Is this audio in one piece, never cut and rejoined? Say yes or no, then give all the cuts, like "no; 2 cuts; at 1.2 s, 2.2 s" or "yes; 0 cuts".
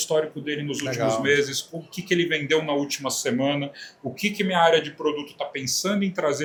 yes; 0 cuts